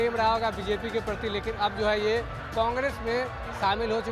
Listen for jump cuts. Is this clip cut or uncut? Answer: uncut